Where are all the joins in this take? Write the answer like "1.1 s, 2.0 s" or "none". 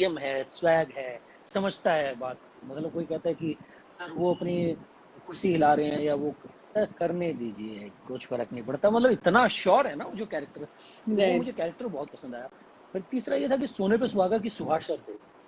none

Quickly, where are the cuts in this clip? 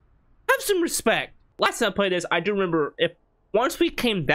1.4 s

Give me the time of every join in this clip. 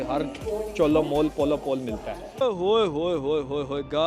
2.4 s

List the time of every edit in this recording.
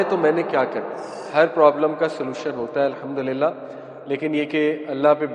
1.2 s

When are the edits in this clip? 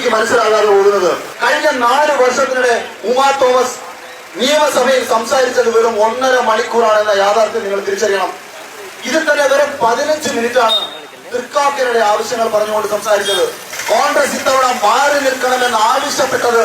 1.3 s, 13.7 s

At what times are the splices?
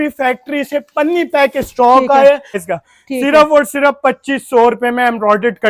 2.7 s

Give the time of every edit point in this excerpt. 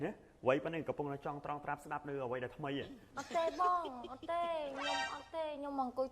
3.0 s

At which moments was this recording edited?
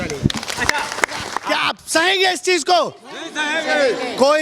1.3 s

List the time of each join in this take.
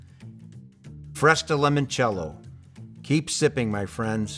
1.0 s

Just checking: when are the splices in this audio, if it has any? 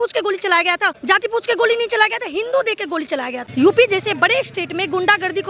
0.9 s, 3.4 s

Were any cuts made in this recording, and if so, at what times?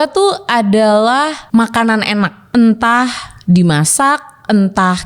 1.4 s, 2.4 s

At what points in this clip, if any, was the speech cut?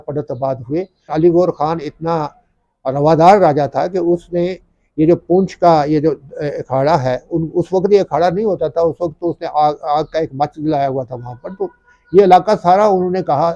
1.1 s

